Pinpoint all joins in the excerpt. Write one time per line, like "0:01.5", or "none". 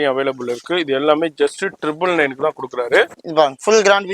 0:03.2